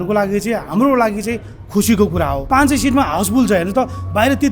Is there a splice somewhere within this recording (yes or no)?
yes